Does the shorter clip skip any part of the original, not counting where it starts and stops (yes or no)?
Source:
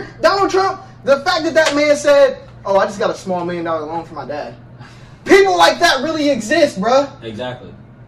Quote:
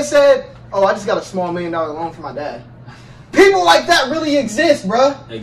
no